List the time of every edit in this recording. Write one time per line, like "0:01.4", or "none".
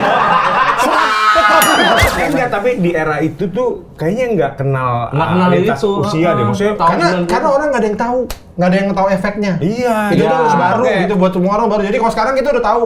0:02.1

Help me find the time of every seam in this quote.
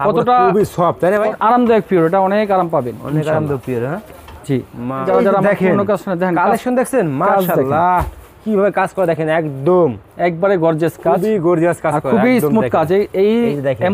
0:01.3
0:05.0

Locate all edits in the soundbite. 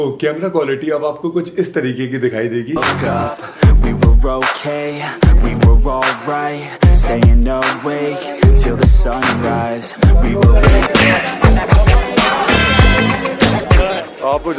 0:02.8
0:10.8

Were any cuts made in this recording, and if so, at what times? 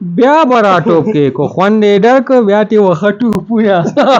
none

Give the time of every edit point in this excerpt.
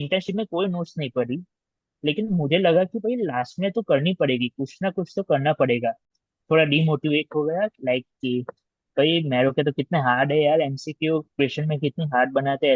0:06.1

